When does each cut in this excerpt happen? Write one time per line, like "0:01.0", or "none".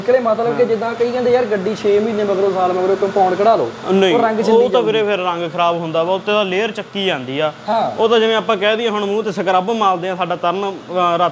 none